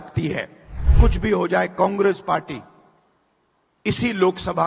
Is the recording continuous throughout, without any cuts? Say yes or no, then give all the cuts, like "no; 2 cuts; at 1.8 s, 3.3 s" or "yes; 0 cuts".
no; 1 cut; at 0.9 s